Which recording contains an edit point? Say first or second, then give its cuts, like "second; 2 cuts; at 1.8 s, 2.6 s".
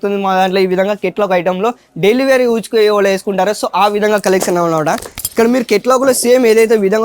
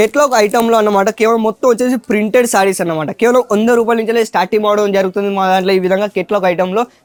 first; 1 cut; at 5.1 s